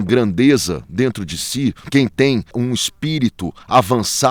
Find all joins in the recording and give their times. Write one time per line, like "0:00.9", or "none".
0:01.8
0:02.6